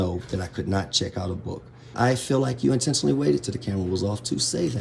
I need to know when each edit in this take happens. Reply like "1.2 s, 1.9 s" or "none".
1.9 s